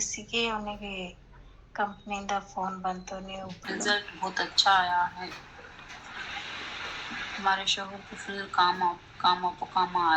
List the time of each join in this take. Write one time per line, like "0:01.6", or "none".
0:03.6